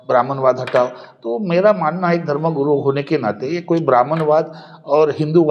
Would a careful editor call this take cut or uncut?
uncut